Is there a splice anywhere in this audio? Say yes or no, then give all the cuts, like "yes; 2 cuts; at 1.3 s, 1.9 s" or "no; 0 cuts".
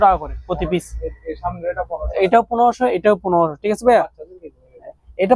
no; 0 cuts